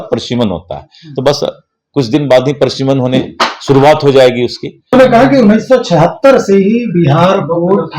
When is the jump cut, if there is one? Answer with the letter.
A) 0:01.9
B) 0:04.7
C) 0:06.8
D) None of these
B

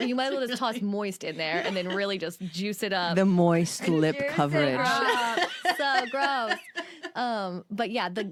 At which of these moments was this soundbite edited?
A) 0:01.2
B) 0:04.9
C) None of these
C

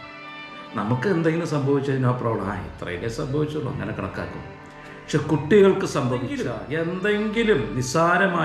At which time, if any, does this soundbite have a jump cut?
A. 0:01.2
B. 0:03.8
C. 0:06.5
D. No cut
C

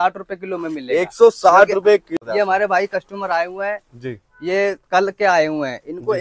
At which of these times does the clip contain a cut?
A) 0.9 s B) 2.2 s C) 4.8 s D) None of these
B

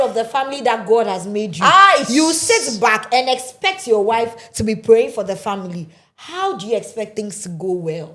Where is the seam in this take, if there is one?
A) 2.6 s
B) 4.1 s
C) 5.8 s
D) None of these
D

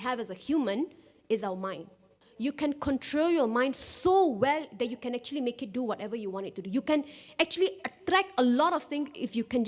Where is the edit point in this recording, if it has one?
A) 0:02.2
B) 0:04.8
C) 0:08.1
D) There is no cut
A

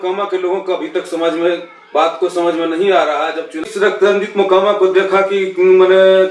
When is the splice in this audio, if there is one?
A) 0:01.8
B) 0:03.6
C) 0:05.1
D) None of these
B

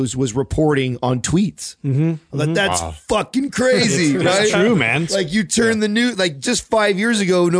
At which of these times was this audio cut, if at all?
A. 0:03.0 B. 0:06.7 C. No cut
C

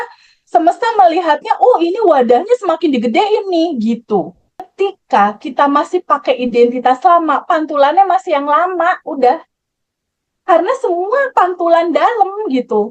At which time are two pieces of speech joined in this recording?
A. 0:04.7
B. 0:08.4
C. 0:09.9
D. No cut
A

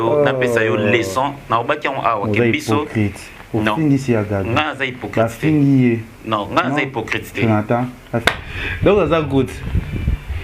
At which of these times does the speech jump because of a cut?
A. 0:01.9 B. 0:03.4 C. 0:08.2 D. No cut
C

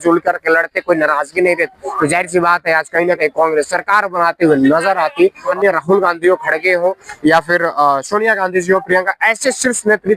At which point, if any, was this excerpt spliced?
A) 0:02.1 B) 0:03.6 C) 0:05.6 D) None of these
C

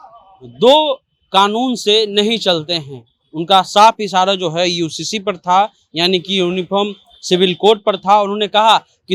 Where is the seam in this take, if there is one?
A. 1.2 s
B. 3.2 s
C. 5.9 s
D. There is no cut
D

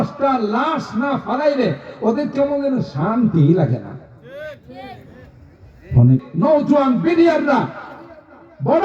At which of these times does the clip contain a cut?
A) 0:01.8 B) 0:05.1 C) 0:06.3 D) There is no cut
C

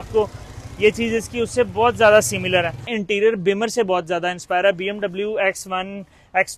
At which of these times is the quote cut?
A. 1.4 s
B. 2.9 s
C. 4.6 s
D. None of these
B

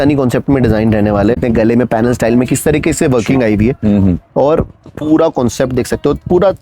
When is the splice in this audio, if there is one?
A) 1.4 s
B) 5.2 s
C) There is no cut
A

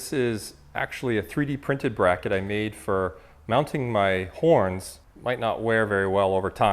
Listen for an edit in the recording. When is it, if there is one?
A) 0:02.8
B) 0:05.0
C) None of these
B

